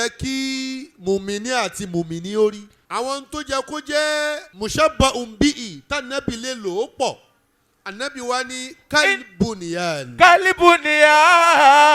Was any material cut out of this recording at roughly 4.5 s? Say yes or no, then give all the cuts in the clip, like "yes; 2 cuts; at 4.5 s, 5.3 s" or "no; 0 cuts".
yes; 2 cuts; at 2.7 s, 4.5 s